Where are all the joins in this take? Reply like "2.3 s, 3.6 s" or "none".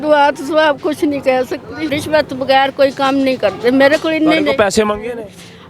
2.0 s